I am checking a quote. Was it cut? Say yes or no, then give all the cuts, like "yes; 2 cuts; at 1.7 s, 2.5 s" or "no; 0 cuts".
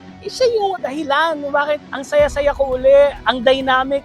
yes; 2 cuts; at 0.7 s, 1.9 s